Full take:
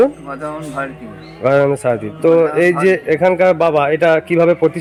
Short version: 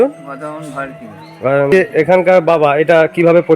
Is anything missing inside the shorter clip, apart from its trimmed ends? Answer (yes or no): yes